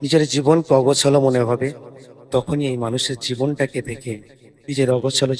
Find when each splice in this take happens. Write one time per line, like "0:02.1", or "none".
none